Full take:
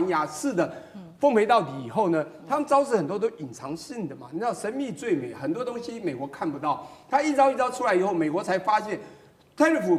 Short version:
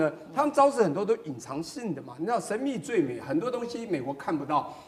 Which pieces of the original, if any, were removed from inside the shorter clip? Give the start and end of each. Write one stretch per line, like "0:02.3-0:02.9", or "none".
none